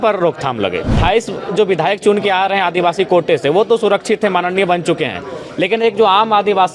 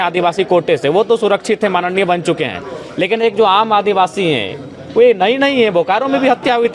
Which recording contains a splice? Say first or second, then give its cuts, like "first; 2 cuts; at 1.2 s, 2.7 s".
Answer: first; 1 cut; at 1.0 s